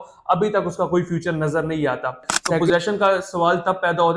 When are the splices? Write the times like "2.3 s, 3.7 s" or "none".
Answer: 2.6 s